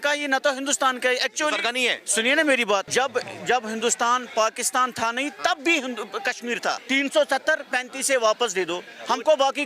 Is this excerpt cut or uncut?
cut